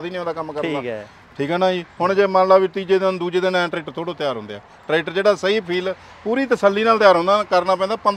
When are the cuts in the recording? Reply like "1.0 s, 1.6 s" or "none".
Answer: none